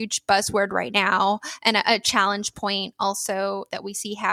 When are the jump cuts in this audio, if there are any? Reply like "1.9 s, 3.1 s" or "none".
none